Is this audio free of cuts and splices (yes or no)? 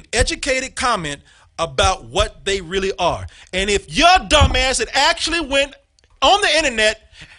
yes